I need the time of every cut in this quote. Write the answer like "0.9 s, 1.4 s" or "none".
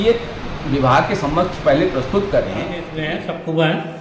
2.9 s